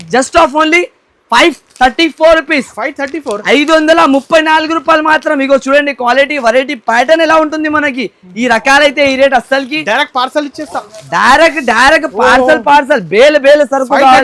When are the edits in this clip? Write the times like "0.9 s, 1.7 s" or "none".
none